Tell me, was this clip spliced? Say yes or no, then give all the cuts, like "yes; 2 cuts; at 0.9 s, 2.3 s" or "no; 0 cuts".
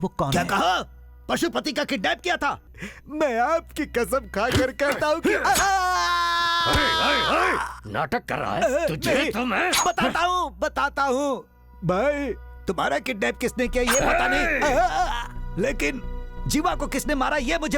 yes; 1 cut; at 2.6 s